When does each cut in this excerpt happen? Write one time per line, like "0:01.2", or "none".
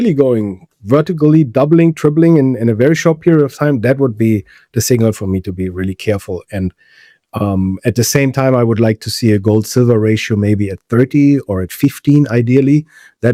none